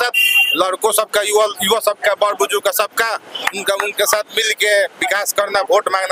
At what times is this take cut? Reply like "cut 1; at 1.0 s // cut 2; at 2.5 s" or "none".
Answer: none